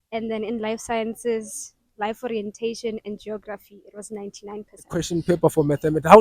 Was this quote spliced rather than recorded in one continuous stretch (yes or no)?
yes